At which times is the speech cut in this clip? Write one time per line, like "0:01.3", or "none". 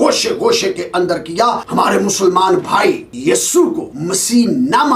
0:01.6
0:03.1
0:03.9